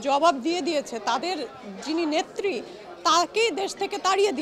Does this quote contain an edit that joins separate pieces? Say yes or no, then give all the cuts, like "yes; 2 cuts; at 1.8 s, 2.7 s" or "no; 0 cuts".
no; 0 cuts